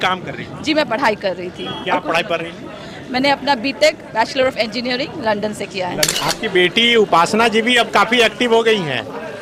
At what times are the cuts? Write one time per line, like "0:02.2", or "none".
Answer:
0:06.1